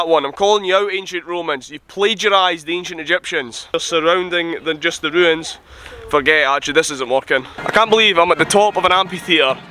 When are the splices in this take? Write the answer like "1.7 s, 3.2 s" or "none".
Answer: 3.7 s, 7.6 s